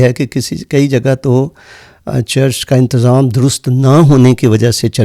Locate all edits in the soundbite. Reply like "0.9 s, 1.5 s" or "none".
none